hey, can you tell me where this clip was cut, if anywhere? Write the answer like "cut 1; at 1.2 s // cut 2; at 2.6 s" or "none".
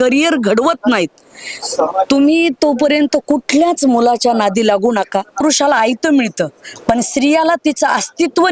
cut 1; at 5.4 s